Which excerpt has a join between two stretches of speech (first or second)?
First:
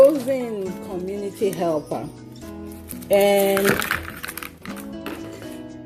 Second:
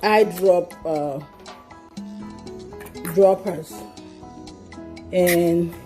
second